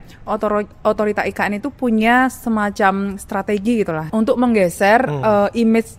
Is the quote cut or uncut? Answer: cut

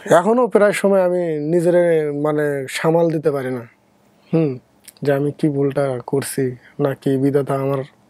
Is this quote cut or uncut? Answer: uncut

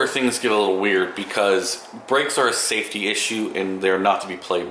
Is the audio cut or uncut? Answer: uncut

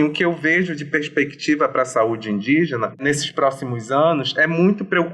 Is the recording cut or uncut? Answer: cut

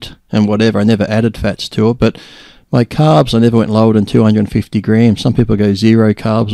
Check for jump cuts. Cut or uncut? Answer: uncut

